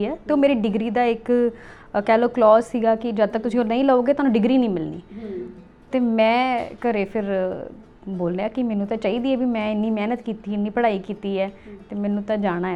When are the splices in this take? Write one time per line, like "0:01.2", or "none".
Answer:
none